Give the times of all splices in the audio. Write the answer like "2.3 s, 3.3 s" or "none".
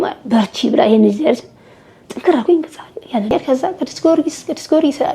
3.3 s